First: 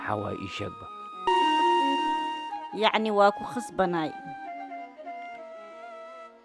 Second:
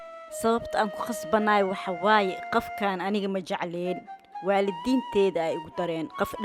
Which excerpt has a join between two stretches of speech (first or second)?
first